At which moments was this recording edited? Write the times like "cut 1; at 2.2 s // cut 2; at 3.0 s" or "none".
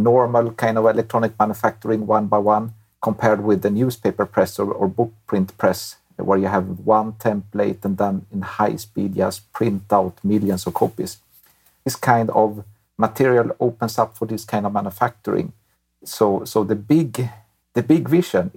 cut 1; at 11.9 s // cut 2; at 16.0 s